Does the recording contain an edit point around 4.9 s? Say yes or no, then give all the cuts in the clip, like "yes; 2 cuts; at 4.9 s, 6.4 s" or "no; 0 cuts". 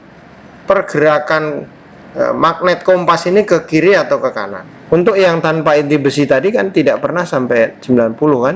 yes; 1 cut; at 4.9 s